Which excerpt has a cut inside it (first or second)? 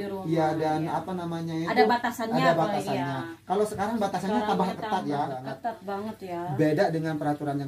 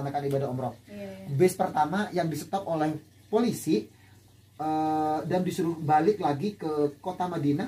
first